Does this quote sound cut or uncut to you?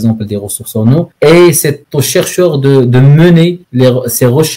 cut